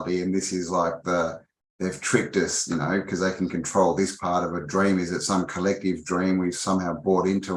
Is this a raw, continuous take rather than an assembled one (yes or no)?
yes